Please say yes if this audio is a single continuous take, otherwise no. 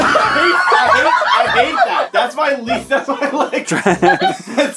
yes